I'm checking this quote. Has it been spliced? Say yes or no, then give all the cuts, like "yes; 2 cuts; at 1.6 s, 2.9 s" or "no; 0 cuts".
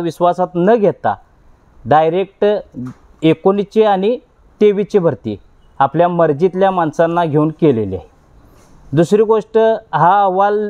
no; 0 cuts